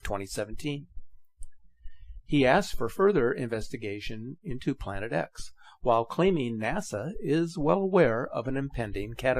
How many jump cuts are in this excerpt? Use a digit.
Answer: 1